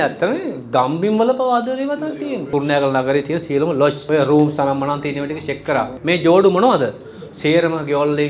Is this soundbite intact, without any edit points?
no; 3 cuts; at 2.4 s, 4.0 s, 5.9 s

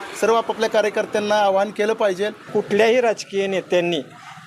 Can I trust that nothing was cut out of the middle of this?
no; 1 cut; at 2.4 s

